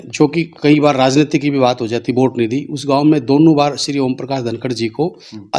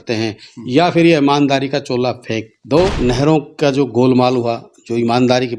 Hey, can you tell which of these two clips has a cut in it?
second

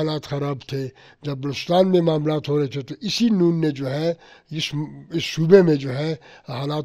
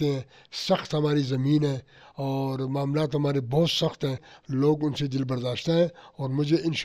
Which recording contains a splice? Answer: second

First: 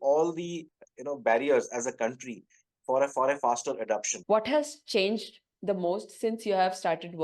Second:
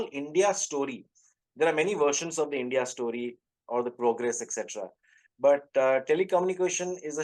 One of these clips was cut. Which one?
first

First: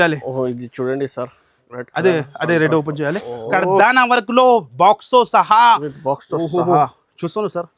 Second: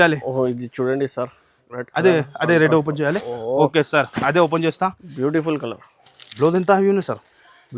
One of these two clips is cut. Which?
first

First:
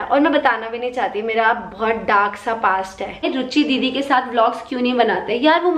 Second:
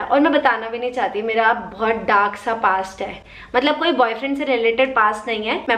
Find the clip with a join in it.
first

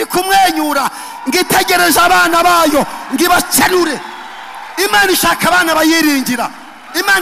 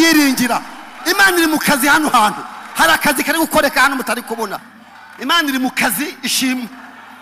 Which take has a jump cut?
second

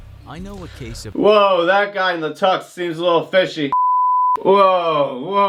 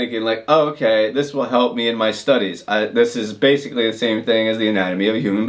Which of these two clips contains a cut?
first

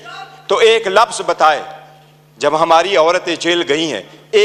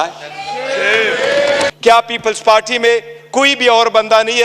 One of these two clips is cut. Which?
second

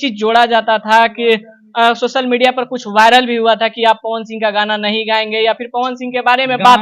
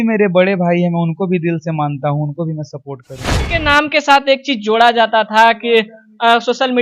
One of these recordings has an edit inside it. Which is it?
second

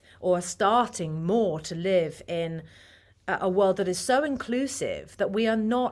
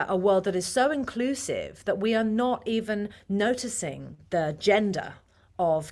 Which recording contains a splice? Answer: second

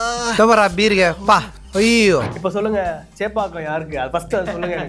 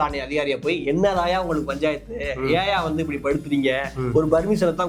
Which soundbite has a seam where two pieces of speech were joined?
first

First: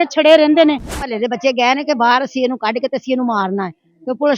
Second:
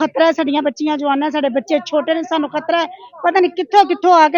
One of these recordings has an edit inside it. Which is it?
first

